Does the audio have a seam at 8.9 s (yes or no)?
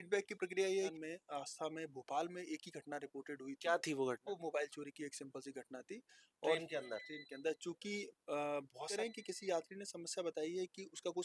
yes